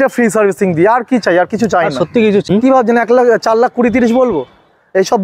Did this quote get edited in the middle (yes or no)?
yes